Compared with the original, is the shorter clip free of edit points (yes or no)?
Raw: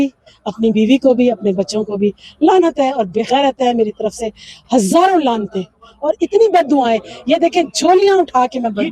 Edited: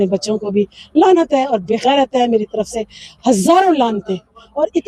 yes